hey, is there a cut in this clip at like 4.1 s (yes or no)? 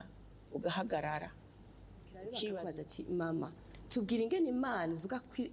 no